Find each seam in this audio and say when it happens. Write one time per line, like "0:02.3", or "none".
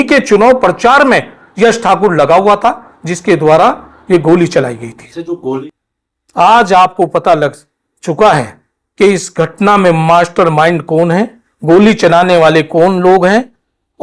0:05.6